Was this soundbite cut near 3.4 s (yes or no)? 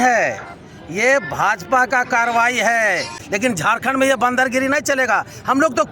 yes